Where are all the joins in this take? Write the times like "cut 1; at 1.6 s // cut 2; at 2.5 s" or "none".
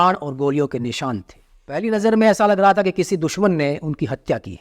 cut 1; at 1.8 s